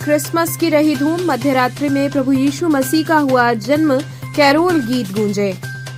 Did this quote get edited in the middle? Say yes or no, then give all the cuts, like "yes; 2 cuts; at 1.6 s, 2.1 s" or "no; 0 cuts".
no; 0 cuts